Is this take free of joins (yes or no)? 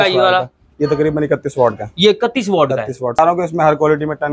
no